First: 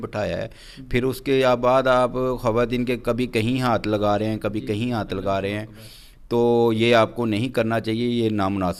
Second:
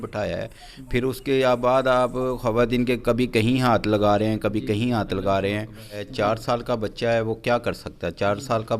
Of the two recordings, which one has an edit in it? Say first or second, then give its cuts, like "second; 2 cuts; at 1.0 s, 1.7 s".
second; 1 cut; at 6.0 s